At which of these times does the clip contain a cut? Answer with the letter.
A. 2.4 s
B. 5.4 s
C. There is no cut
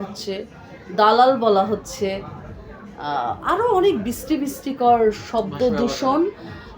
C